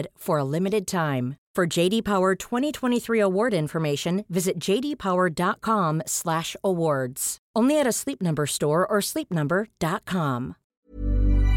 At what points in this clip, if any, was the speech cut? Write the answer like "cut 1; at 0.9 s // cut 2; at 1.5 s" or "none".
cut 1; at 10.6 s

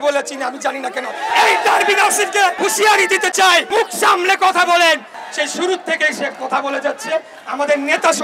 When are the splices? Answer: cut 1; at 1.3 s // cut 2; at 2.6 s // cut 3; at 3.7 s // cut 4; at 5.2 s

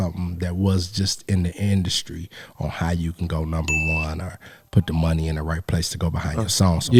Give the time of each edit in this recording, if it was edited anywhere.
none

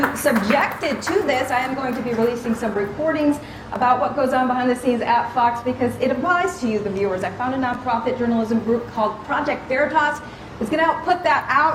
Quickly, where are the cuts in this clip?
none

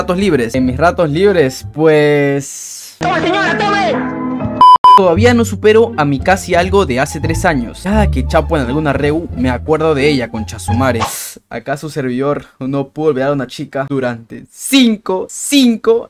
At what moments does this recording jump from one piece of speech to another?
cut 1; at 5.0 s

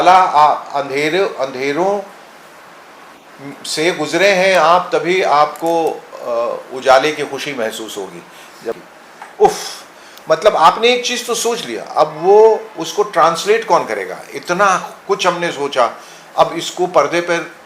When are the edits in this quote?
cut 1; at 8.8 s

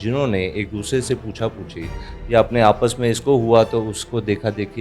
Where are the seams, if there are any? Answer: none

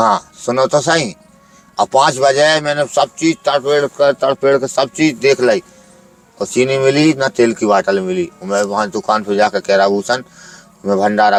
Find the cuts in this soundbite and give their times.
none

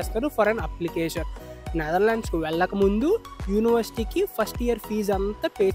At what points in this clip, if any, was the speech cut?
cut 1; at 1.4 s

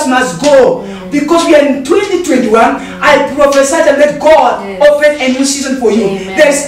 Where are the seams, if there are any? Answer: none

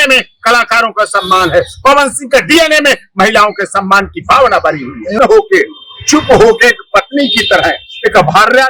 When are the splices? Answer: cut 1; at 5.2 s

